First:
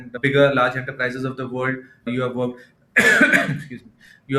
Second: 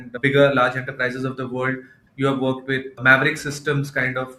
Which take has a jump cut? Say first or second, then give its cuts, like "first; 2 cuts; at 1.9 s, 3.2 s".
second; 1 cut; at 1.9 s